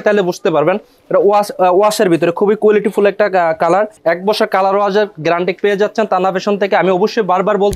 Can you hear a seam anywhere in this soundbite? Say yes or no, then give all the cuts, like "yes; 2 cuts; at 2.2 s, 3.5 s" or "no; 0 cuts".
yes; 1 cut; at 3.9 s